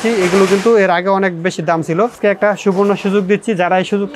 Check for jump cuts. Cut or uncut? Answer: cut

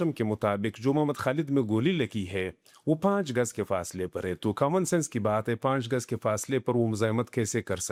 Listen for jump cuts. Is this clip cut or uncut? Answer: uncut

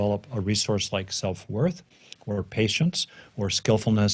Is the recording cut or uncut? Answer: uncut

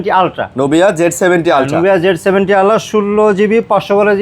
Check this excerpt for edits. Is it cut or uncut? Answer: uncut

